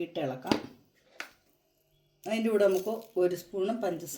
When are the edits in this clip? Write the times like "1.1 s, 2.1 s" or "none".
none